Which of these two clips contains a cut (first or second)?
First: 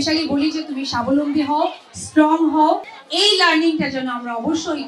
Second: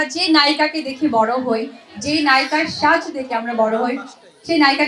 first